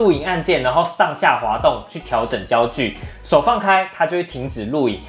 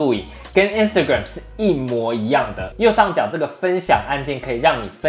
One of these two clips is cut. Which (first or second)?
second